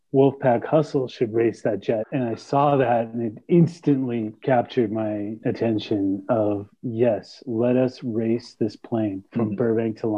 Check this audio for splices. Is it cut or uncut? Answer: cut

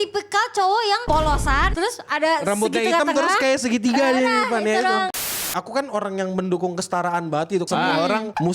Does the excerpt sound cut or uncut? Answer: cut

